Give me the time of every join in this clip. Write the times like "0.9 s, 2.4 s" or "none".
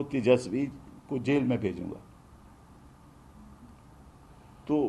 none